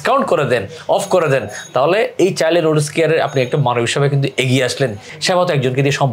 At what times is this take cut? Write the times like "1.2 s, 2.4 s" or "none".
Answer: 5.1 s